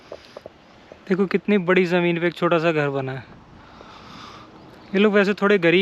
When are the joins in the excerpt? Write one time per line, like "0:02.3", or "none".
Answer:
none